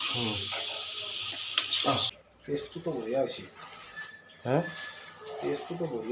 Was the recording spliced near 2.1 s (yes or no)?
yes